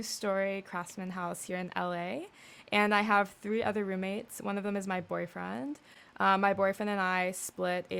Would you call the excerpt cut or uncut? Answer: uncut